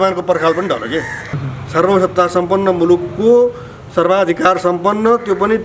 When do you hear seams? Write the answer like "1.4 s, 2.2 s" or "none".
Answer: 1.2 s